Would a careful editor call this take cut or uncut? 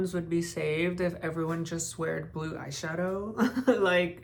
uncut